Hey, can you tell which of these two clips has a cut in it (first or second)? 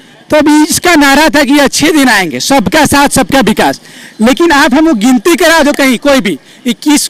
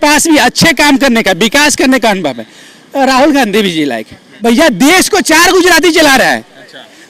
second